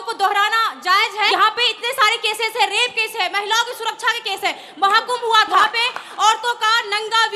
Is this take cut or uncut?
cut